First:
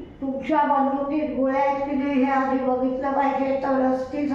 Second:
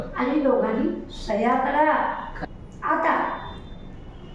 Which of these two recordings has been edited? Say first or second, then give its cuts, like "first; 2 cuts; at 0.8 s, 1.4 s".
second; 1 cut; at 2.3 s